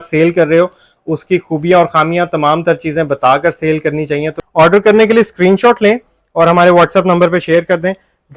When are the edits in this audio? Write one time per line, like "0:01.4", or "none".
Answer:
0:04.4